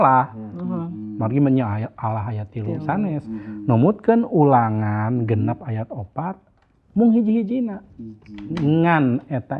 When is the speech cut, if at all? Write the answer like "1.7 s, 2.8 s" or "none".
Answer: none